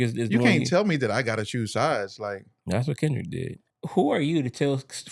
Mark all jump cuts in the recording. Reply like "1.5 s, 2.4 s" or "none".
3.6 s